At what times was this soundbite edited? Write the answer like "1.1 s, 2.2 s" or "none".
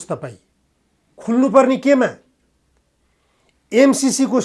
none